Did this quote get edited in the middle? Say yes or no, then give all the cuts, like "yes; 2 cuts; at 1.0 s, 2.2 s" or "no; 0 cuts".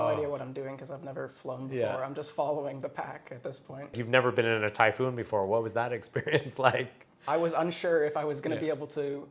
yes; 2 cuts; at 4.0 s, 7.1 s